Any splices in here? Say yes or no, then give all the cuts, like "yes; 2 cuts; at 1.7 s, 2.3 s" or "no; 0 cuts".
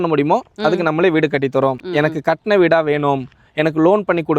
yes; 1 cut; at 1.8 s